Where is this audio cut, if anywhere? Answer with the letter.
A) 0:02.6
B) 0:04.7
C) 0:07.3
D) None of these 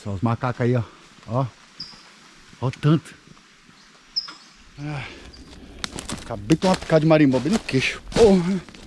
B